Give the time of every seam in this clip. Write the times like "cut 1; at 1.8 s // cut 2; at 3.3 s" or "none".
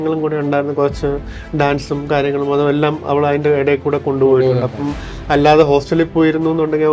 none